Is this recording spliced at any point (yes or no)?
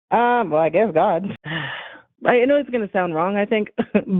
yes